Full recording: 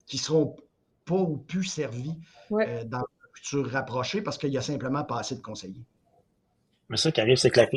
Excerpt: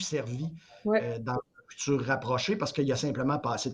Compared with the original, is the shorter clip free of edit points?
yes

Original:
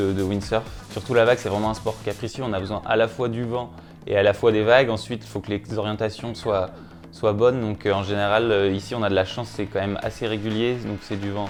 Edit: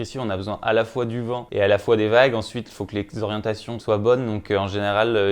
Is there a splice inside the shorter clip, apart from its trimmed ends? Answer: yes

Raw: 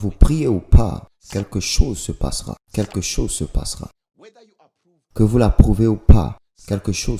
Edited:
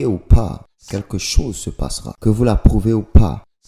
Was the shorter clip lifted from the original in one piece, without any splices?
no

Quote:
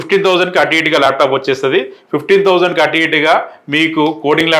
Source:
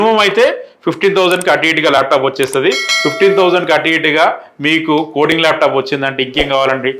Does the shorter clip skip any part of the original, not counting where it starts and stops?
no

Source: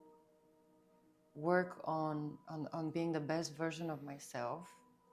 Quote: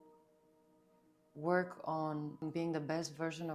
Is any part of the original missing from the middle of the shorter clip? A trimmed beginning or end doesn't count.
yes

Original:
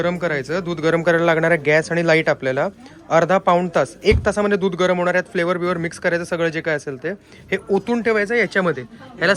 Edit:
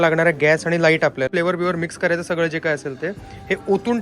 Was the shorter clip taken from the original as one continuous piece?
no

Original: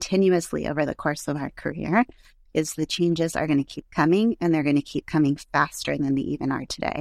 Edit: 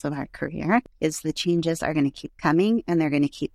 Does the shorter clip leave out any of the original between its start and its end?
yes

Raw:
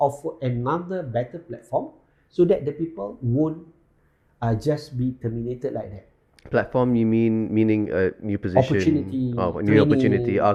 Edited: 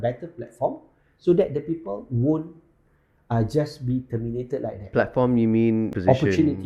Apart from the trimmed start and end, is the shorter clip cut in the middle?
yes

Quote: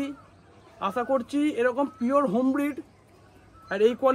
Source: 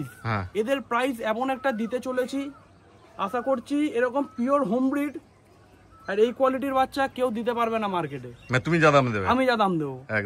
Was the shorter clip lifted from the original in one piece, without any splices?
yes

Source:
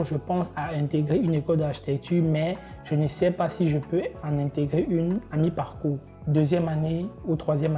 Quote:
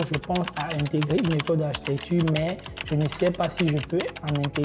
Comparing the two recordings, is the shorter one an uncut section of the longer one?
yes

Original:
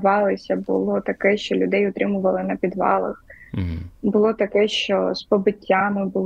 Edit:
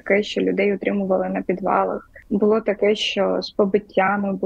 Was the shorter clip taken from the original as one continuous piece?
no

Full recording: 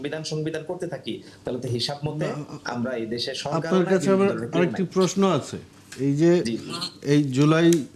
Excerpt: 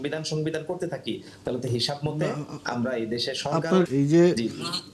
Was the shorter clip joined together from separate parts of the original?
yes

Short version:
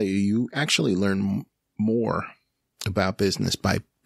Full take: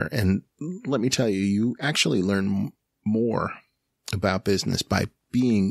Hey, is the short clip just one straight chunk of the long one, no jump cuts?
yes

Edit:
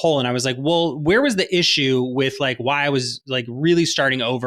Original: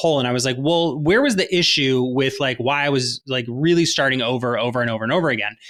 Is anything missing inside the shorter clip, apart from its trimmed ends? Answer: no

